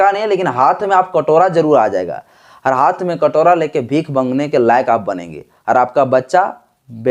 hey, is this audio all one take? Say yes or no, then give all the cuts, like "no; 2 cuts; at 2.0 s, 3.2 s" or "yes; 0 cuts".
yes; 0 cuts